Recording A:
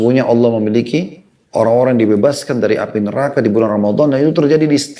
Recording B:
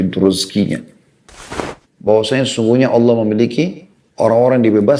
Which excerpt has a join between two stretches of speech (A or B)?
B